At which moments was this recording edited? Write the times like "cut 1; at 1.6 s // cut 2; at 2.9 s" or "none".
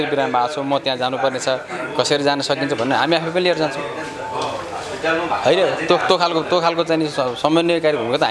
none